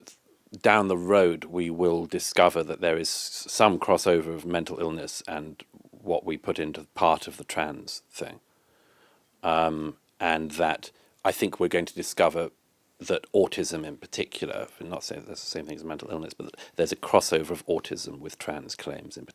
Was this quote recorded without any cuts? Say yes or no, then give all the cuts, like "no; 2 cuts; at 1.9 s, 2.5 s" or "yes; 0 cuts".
yes; 0 cuts